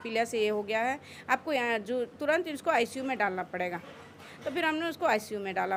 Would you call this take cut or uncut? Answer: uncut